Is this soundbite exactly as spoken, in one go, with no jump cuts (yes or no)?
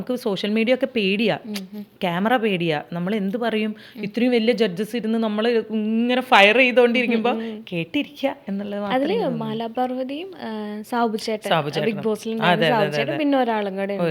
yes